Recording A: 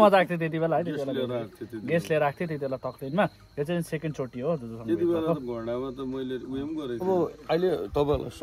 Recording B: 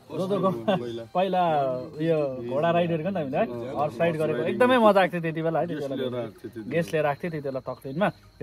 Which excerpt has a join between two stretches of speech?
A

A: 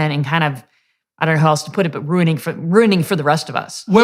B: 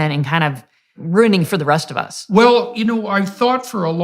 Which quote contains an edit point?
B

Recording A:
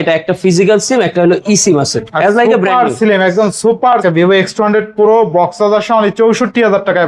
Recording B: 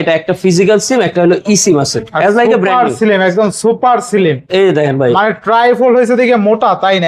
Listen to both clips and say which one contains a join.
A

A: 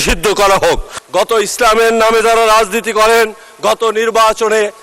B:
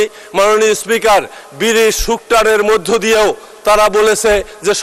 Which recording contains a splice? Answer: A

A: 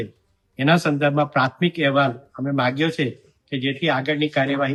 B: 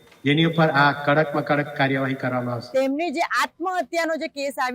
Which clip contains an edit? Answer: B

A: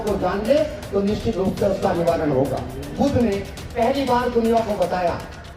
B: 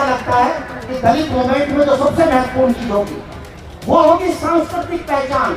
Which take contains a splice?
A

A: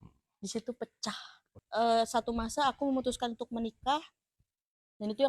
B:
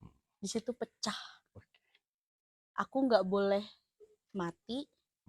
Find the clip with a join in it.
A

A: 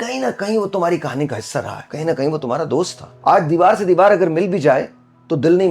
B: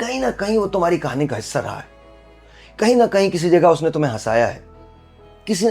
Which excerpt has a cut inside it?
A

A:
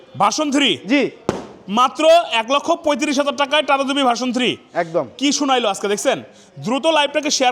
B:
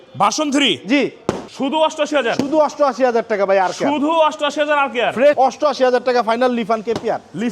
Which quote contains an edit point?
B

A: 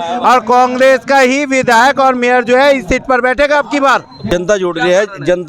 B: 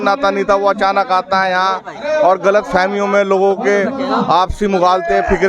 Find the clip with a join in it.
A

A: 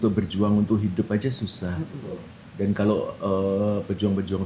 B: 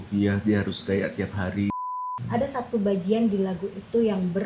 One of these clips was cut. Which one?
B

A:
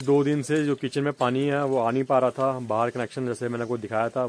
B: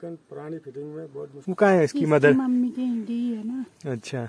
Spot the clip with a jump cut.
B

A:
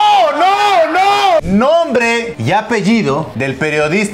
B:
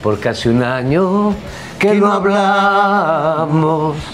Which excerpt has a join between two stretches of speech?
A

